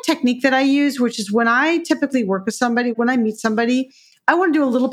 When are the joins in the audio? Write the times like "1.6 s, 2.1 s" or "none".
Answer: 2.9 s